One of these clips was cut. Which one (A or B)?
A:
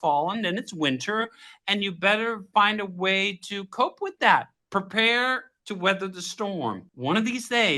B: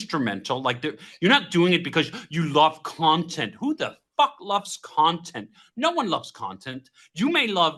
A